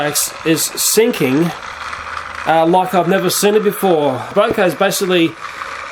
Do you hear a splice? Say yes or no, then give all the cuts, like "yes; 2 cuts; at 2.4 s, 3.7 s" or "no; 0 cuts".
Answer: yes; 1 cut; at 4.3 s